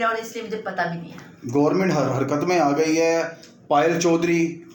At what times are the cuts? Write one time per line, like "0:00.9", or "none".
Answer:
none